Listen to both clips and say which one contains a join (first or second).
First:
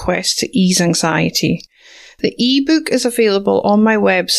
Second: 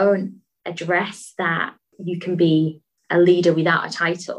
second